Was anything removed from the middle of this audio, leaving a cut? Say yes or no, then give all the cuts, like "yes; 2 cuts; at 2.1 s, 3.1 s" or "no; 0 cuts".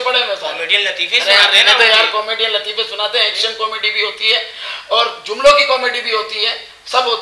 no; 0 cuts